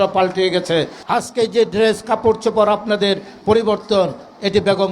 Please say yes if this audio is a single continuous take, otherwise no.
no